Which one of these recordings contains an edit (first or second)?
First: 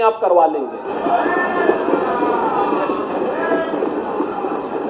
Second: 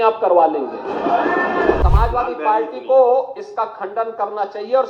second